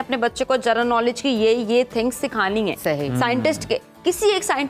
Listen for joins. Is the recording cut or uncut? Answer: uncut